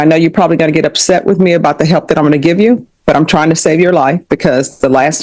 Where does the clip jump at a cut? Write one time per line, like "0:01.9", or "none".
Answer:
none